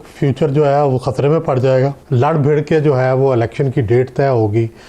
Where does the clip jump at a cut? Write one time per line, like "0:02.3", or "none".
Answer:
0:02.0